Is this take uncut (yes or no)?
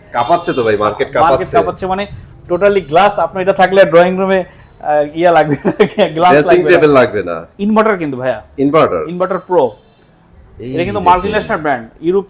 yes